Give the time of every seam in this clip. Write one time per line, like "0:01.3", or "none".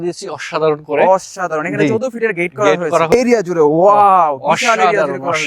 0:03.1